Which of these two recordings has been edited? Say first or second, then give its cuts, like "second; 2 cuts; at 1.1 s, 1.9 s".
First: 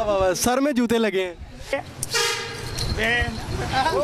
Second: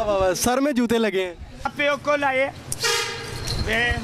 first; 1 cut; at 1.7 s